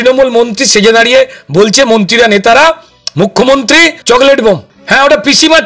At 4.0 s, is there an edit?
yes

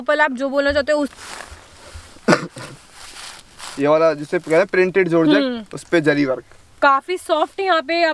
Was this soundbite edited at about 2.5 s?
no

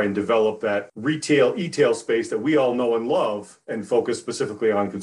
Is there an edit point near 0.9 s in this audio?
yes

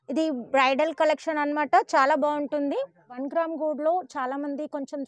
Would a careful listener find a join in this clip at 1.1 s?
no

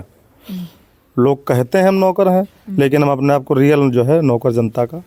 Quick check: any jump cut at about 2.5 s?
no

